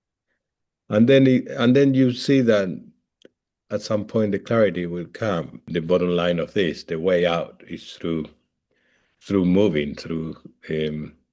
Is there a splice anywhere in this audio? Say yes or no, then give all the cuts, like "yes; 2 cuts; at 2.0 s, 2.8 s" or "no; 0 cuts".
yes; 1 cut; at 5.7 s